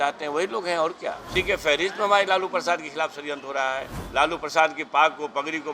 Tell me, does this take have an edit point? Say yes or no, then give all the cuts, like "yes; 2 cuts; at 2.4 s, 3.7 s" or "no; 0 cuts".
yes; 2 cuts; at 1.2 s, 3.9 s